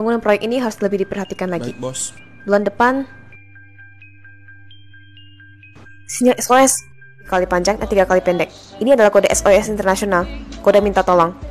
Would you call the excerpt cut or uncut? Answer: cut